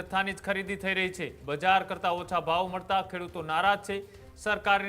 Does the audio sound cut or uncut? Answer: cut